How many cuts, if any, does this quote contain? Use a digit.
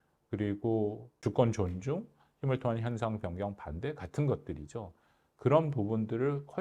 1